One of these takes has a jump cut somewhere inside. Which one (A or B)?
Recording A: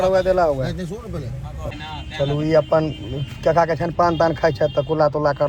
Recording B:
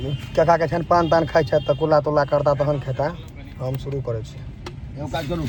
A